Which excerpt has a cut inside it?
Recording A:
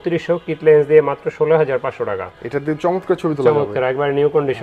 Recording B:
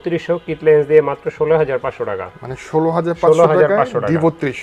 A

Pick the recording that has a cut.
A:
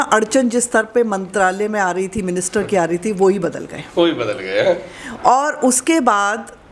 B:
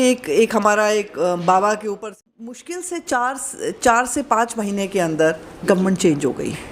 B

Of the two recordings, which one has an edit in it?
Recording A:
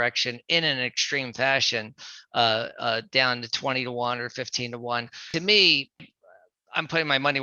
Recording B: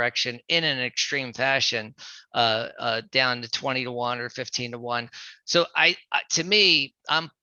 A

